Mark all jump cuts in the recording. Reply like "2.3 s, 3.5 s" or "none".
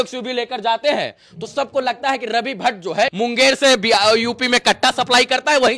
3.1 s